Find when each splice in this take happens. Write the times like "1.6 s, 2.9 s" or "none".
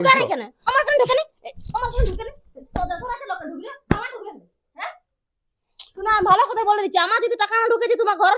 none